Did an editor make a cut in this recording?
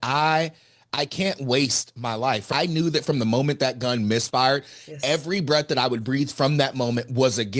yes; 1 cut; at 2.4 s

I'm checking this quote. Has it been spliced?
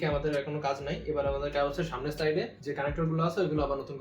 yes; 1 cut; at 2.6 s

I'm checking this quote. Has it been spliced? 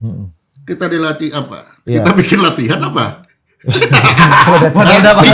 no; 0 cuts

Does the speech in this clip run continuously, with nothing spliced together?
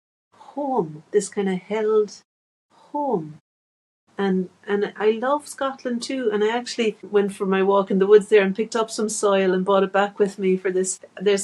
yes; 0 cuts

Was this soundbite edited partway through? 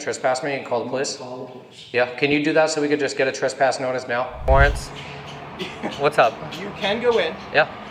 yes; 1 cut; at 4.5 s

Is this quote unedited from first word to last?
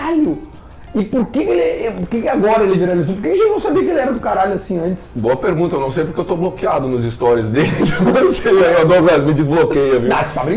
yes; 0 cuts

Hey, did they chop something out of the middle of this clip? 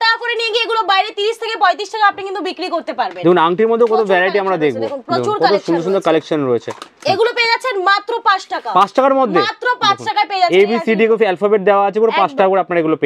no; 0 cuts

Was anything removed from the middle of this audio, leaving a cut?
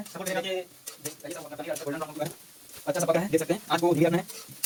no; 0 cuts

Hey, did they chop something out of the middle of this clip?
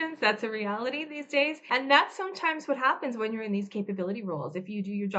no; 0 cuts

